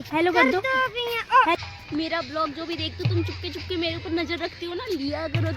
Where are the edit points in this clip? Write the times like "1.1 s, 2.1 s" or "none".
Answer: 1.6 s